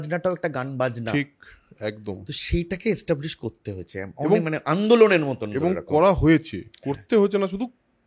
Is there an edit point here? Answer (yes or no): no